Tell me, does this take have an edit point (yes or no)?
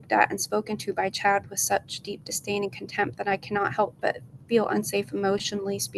no